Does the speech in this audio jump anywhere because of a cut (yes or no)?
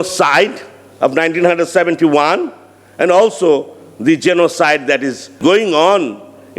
yes